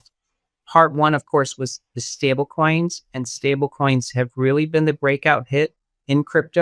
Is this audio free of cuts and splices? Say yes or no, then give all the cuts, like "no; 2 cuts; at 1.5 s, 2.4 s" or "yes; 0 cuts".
yes; 0 cuts